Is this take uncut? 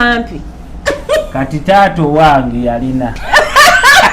no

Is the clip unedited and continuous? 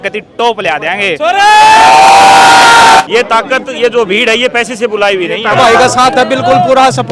no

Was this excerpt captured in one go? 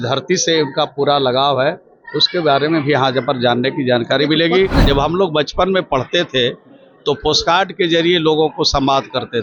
no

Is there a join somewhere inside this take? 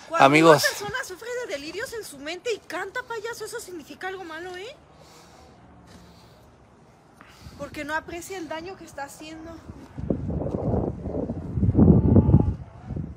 no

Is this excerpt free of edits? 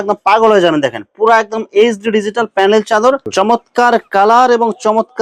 no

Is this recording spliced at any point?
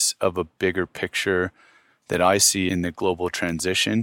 yes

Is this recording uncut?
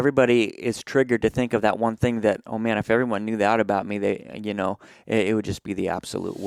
yes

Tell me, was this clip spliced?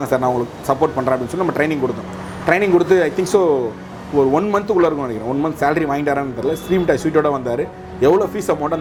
no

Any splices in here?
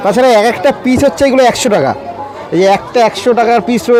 no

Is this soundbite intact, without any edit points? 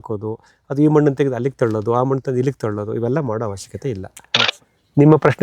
no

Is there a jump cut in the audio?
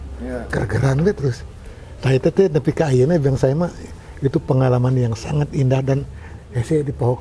no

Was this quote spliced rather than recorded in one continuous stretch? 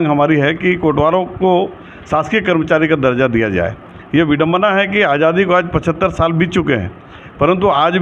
no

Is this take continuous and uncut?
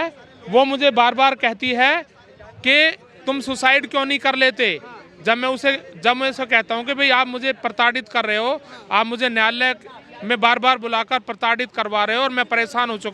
yes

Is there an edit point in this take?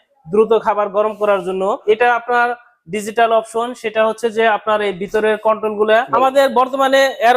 yes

